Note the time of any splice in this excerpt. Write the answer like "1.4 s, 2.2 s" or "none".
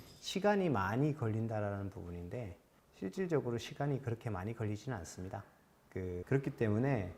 6.2 s